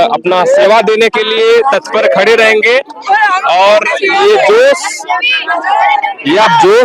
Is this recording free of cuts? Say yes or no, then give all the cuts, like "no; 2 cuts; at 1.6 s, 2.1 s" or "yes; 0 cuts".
yes; 0 cuts